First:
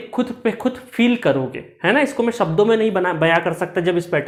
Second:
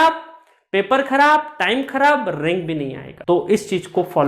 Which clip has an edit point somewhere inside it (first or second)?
second